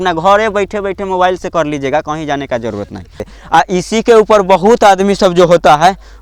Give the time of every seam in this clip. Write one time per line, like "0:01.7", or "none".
0:03.3